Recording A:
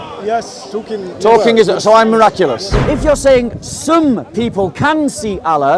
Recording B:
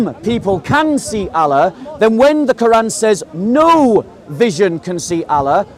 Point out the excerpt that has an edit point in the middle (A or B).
A